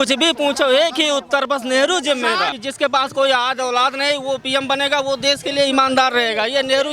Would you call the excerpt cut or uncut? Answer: cut